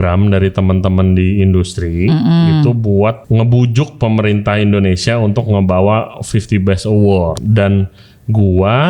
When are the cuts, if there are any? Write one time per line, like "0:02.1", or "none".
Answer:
0:03.2
0:07.4